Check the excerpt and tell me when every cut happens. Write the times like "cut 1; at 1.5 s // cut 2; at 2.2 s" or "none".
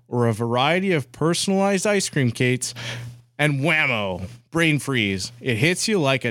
none